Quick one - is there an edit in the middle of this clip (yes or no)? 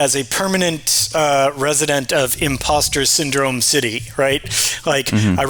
no